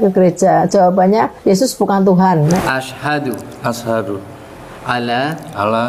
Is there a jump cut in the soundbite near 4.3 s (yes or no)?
no